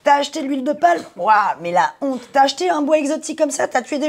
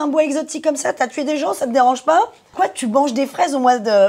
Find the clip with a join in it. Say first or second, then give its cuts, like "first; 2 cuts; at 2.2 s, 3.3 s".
second; 1 cut; at 2.4 s